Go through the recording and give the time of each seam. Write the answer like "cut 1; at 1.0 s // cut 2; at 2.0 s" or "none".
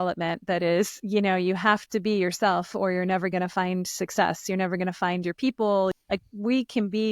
cut 1; at 1.0 s // cut 2; at 5.9 s

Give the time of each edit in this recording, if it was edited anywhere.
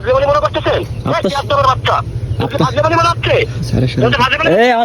none

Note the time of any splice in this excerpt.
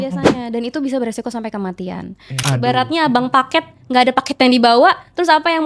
cut 1; at 2.4 s

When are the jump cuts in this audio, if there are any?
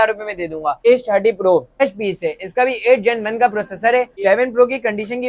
cut 1; at 0.8 s // cut 2; at 1.8 s // cut 3; at 4.1 s

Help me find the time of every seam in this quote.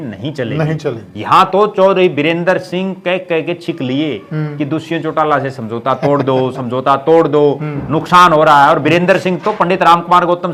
none

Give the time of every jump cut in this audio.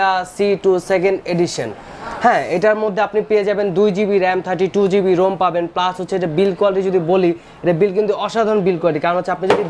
none

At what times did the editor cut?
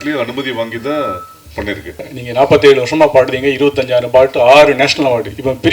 cut 1; at 2.1 s

